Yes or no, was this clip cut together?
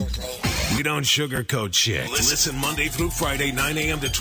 no